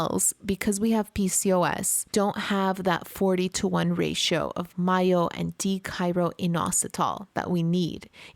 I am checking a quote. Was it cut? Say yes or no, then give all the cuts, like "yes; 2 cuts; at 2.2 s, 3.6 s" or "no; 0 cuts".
no; 0 cuts